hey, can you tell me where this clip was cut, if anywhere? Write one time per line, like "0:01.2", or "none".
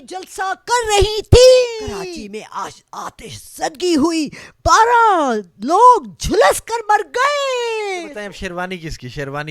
0:02.1
0:08.1